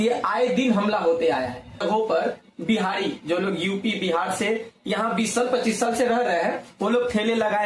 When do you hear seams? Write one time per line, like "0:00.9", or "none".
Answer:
0:01.8